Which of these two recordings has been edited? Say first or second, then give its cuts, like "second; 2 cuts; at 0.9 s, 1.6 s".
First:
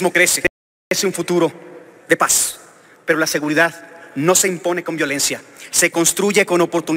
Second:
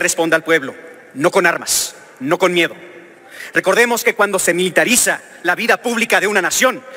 first; 1 cut; at 0.9 s